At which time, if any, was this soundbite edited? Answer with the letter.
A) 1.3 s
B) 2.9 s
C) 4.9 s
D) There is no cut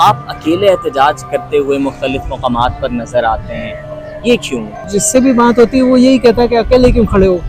C